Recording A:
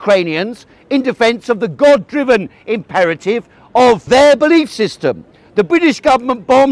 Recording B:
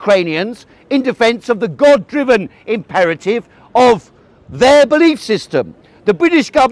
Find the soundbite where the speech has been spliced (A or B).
A